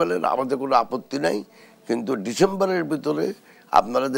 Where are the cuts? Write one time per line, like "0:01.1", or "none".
none